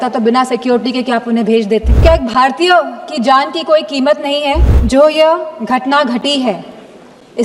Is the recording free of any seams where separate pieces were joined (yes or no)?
no